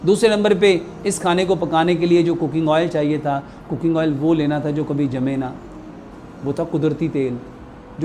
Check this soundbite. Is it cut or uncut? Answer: uncut